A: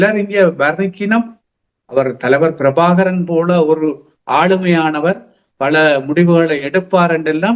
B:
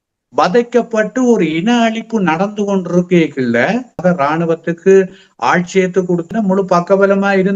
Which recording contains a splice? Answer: B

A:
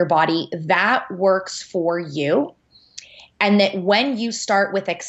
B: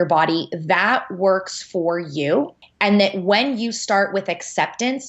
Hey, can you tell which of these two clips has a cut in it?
B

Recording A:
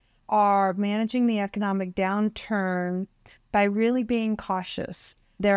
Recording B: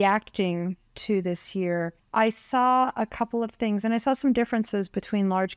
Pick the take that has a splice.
B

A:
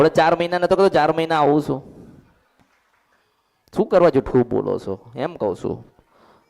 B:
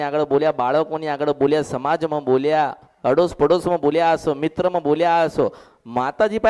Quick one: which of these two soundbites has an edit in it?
A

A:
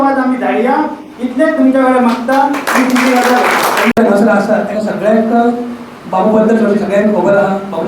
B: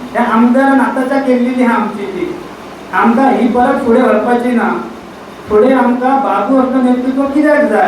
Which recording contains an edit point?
A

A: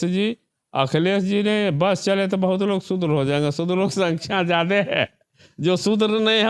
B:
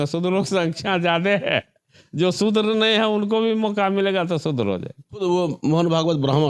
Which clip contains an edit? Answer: B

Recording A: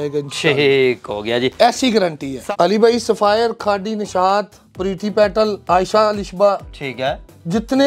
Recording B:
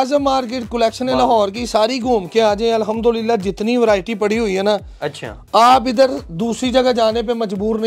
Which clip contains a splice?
A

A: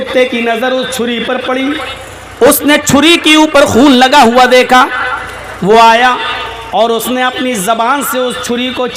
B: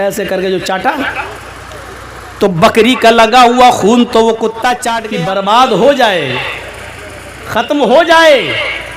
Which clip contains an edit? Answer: B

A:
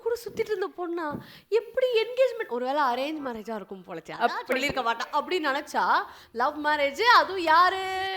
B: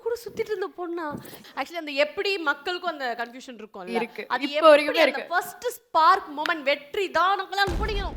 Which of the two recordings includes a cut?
B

